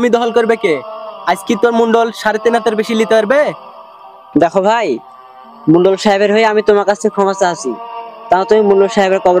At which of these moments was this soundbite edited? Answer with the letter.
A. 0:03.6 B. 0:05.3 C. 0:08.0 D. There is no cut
D